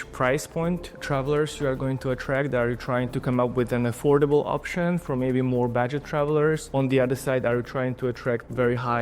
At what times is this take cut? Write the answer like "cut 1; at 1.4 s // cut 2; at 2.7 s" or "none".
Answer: cut 1; at 3.1 s